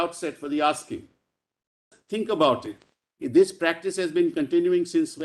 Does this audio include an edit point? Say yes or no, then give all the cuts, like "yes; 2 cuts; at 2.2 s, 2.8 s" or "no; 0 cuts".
yes; 1 cut; at 2.0 s